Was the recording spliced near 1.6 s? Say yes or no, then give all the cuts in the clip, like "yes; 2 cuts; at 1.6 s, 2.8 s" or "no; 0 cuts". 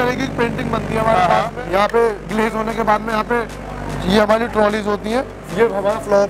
yes; 2 cuts; at 1.6 s, 5.4 s